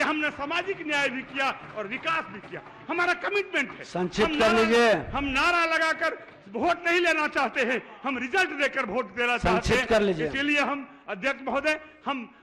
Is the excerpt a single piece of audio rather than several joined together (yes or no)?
yes